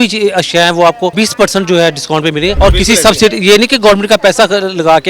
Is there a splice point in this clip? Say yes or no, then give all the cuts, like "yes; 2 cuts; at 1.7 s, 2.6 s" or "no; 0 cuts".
yes; 2 cuts; at 1.1 s, 2.5 s